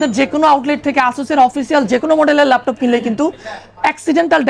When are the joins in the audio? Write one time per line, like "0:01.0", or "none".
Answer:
none